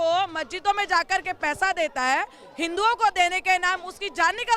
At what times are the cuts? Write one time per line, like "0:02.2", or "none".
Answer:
none